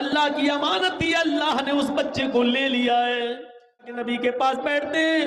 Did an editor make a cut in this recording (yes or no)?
yes